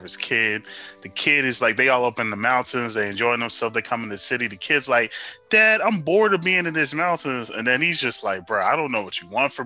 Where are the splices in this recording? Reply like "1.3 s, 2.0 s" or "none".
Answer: none